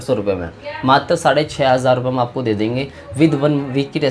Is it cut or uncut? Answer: uncut